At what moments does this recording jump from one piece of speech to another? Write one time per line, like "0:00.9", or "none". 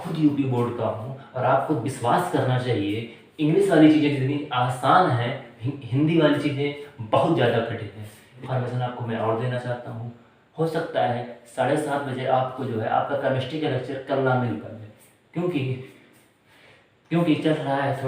0:08.4